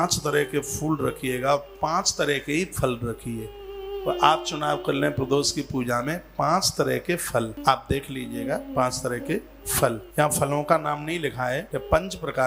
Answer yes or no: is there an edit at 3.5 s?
no